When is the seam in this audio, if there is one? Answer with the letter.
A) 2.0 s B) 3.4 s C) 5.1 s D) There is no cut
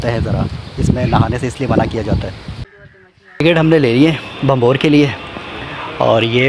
B